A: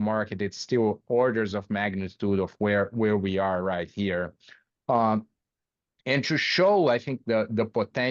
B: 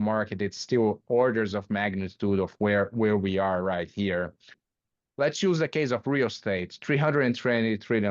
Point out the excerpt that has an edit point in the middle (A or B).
B